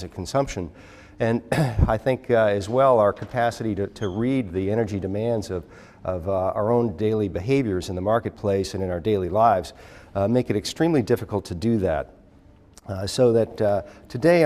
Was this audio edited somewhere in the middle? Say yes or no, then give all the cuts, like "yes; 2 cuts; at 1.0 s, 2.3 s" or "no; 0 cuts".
yes; 1 cut; at 2.6 s